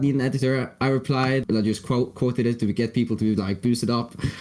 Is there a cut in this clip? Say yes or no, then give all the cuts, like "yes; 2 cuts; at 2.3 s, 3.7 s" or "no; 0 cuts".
yes; 1 cut; at 1.4 s